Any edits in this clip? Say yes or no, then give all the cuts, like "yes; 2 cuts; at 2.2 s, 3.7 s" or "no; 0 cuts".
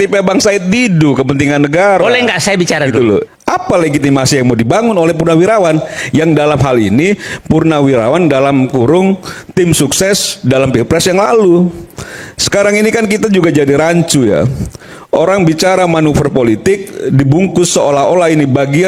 yes; 1 cut; at 3.3 s